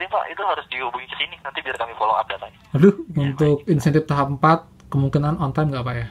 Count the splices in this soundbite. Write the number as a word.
one